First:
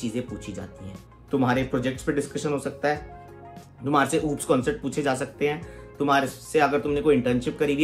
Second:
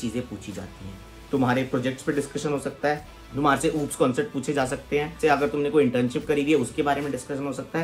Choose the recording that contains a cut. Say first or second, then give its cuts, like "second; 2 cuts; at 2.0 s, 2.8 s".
second; 2 cuts; at 3.2 s, 5.1 s